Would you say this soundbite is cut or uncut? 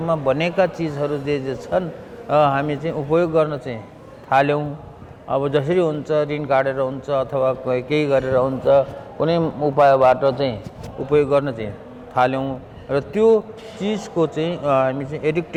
uncut